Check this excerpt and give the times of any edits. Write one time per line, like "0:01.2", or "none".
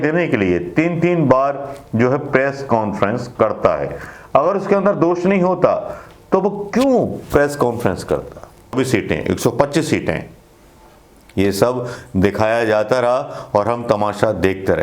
0:08.7